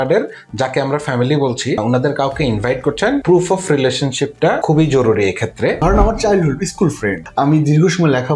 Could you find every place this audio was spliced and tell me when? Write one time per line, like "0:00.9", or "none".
0:01.8
0:03.2
0:04.6
0:05.8
0:07.2